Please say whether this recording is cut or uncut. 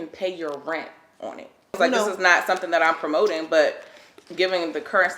cut